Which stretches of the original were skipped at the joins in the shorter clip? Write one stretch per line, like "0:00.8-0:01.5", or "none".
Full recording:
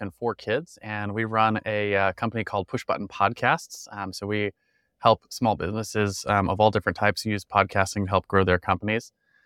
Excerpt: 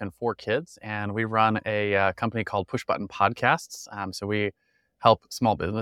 none